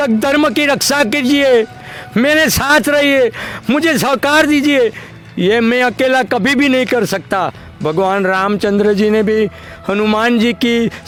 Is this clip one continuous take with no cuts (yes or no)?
yes